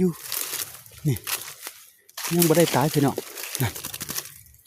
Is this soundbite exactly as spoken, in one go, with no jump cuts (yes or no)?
yes